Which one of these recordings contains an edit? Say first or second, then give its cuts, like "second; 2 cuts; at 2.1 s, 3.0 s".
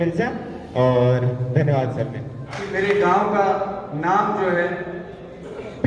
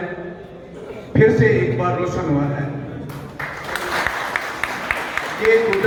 first; 1 cut; at 2.7 s